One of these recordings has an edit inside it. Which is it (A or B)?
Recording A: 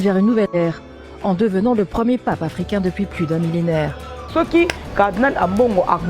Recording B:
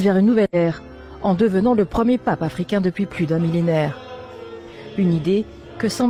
A